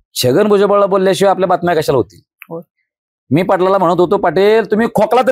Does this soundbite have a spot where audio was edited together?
no; 0 cuts

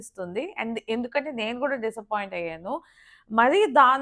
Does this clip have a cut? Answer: no; 0 cuts

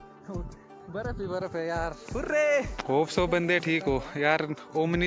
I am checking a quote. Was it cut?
yes; 1 cut; at 2.7 s

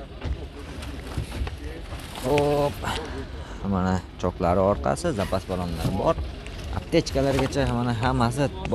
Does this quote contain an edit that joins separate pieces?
no; 0 cuts

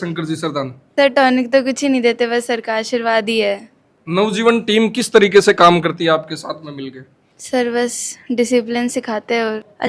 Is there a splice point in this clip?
no; 0 cuts

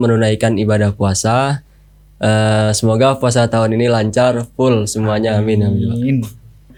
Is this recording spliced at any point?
no; 0 cuts

